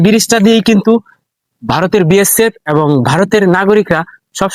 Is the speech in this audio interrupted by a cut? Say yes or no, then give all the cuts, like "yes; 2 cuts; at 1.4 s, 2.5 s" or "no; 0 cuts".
no; 0 cuts